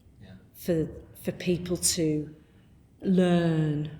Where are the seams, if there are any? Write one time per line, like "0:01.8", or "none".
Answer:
0:03.0